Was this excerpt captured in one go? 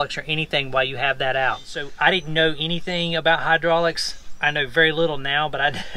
no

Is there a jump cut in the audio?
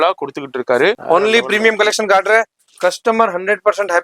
yes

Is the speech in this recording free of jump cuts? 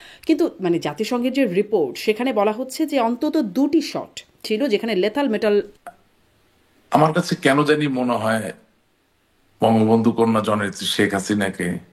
no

